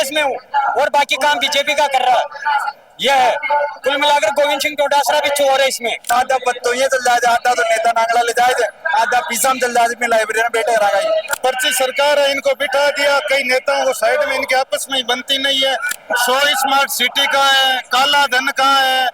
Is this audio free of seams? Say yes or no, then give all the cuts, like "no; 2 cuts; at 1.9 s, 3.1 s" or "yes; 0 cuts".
no; 3 cuts; at 6.0 s, 11.3 s, 15.9 s